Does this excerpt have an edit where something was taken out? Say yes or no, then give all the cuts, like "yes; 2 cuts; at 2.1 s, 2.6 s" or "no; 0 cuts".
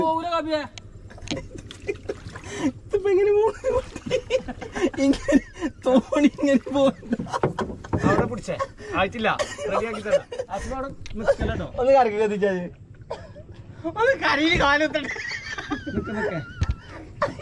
no; 0 cuts